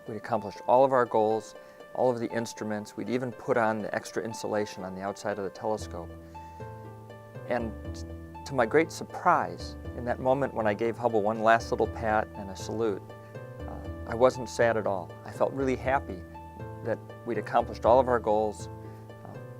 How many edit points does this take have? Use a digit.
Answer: 1